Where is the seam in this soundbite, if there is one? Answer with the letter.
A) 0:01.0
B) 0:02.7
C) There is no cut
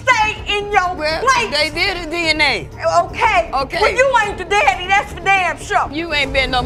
C